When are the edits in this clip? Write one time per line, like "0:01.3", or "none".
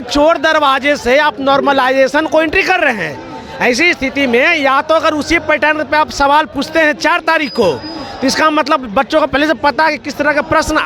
none